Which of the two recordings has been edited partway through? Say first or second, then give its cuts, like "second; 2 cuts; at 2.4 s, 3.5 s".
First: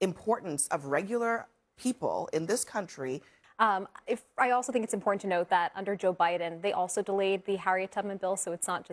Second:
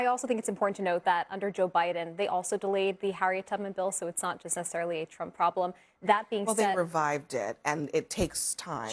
first; 1 cut; at 3.4 s